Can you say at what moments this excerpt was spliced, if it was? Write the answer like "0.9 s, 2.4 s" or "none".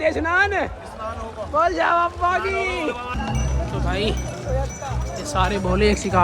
3.1 s